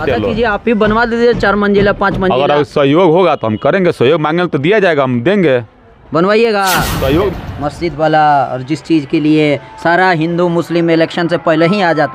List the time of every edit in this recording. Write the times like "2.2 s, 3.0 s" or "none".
7.3 s